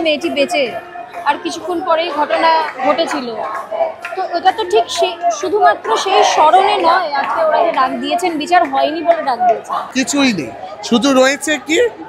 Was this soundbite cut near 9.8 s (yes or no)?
yes